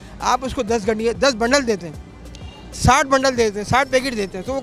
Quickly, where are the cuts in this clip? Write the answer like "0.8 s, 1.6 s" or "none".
none